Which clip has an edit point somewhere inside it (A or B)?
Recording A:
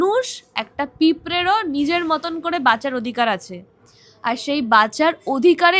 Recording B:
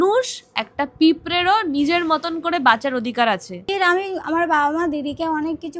B